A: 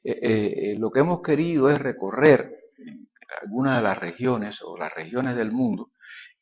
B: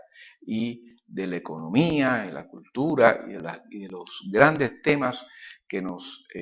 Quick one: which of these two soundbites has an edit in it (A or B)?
B